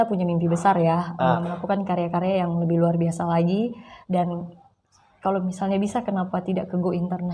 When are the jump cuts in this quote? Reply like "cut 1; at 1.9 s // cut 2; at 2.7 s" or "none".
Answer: cut 1; at 1.4 s